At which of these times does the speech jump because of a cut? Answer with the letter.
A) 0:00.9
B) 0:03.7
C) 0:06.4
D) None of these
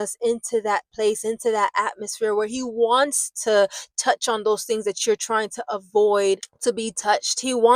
D